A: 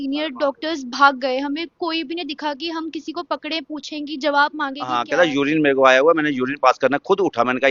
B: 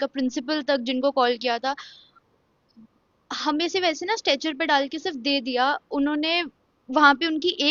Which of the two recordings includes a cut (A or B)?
A